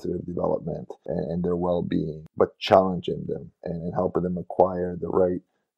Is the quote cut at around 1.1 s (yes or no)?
yes